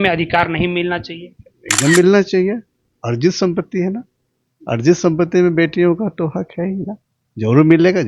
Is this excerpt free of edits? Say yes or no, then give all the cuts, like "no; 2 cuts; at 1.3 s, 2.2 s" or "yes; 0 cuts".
yes; 0 cuts